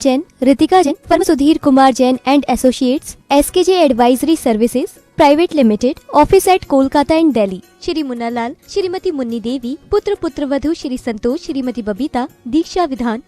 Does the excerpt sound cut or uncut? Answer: cut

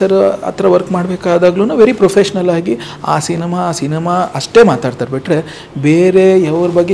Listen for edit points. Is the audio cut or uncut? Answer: uncut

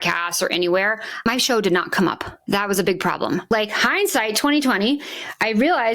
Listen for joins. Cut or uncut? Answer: cut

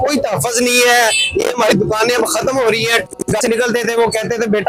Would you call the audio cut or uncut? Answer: cut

